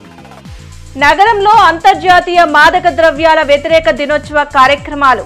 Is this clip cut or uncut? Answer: uncut